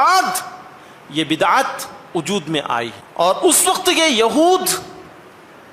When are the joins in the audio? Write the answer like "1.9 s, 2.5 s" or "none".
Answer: 3.0 s